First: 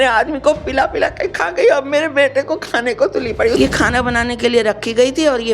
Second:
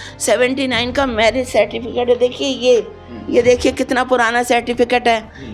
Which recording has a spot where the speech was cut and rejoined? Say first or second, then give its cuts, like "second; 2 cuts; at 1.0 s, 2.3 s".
first; 1 cut; at 3.6 s